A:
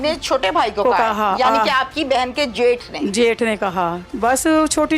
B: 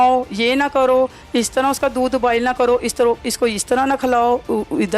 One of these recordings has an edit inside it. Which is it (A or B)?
A